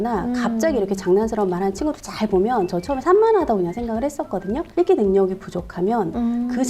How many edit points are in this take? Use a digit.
1